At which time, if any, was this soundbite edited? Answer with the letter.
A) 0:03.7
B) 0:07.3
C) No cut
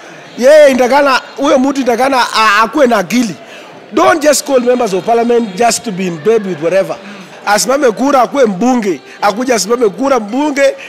B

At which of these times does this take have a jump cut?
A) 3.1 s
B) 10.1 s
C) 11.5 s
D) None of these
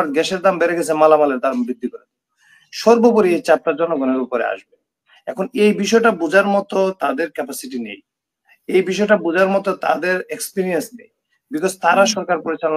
D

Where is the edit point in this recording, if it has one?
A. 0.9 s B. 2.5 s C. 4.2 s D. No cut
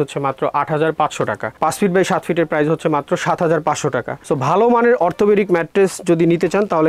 C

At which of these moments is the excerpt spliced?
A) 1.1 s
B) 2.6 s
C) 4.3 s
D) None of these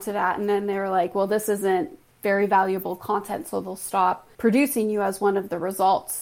C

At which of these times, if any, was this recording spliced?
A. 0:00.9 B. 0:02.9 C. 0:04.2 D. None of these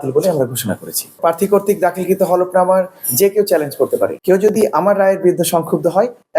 C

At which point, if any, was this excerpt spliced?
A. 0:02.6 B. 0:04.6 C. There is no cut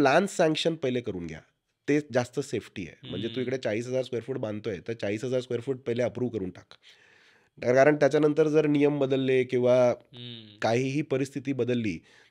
C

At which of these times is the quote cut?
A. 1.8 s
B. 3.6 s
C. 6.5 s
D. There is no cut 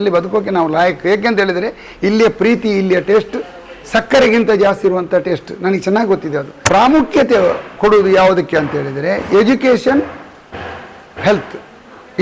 C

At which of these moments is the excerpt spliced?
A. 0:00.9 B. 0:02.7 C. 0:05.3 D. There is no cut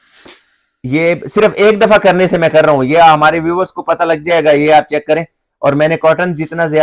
D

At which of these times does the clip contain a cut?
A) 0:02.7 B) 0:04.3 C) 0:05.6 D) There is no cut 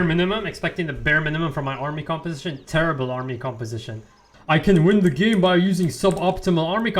B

